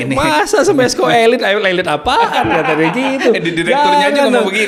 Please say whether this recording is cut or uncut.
uncut